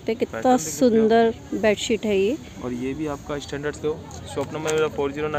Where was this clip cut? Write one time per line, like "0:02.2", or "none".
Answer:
0:03.7